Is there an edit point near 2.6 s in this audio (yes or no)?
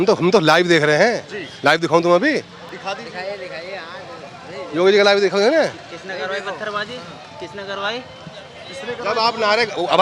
no